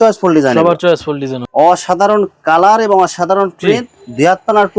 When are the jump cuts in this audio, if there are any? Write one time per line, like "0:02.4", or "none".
0:01.3